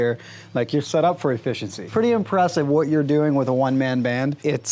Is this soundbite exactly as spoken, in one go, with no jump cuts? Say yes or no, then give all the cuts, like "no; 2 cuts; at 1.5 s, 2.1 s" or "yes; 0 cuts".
no; 1 cut; at 1.8 s